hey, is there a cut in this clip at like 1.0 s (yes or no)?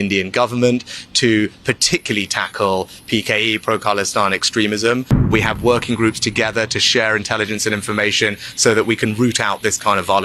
no